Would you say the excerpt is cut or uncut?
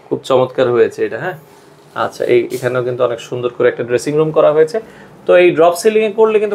uncut